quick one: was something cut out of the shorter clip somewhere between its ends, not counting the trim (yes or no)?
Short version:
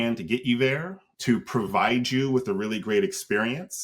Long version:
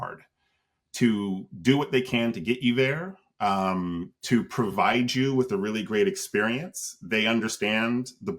yes